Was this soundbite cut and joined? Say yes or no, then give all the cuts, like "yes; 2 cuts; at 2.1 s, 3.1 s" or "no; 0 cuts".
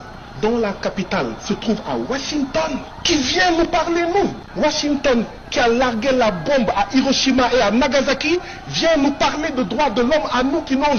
no; 0 cuts